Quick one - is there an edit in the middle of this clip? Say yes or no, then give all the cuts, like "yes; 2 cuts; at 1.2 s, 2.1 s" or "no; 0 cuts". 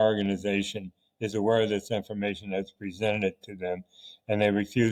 no; 0 cuts